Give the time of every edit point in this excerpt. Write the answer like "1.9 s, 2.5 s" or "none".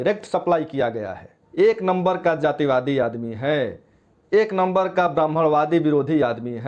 1.4 s